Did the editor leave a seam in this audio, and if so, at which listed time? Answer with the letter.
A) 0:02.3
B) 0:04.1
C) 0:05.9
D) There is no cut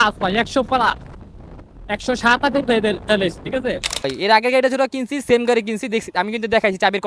B